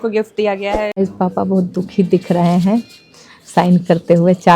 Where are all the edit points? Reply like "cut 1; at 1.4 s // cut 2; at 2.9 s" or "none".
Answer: cut 1; at 0.9 s